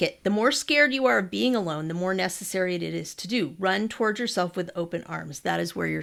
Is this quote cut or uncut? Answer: uncut